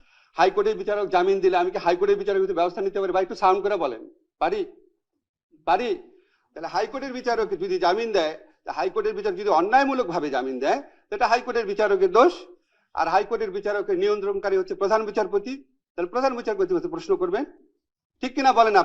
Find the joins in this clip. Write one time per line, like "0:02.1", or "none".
none